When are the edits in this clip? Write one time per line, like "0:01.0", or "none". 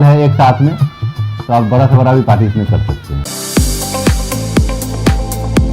0:03.2